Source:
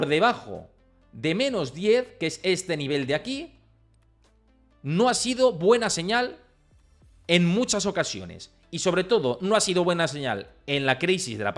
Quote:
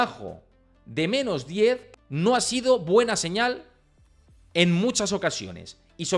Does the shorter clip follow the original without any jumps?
no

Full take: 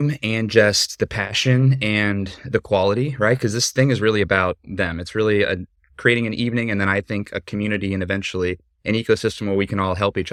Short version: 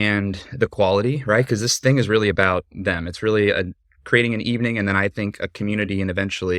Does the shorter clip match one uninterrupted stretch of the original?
yes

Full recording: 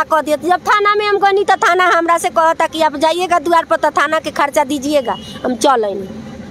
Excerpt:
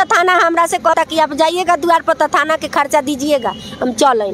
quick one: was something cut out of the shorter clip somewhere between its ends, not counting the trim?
yes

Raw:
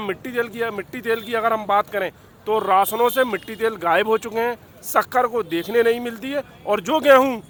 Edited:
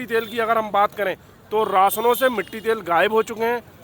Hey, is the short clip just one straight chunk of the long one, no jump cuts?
yes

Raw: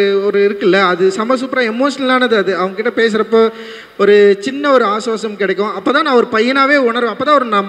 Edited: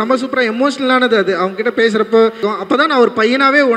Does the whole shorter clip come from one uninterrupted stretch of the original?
no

